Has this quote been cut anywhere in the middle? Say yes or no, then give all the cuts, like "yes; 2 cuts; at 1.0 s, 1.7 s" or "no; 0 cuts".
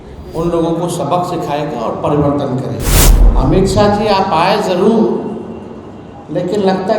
yes; 1 cut; at 3.1 s